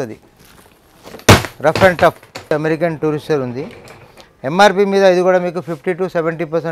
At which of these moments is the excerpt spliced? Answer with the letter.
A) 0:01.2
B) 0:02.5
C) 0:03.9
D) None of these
B